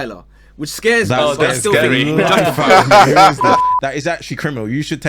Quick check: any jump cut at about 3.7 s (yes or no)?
yes